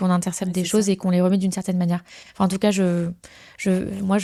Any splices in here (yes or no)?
no